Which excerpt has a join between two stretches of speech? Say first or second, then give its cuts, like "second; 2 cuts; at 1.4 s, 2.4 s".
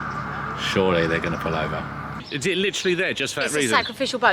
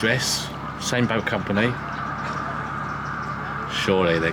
first; 1 cut; at 2.2 s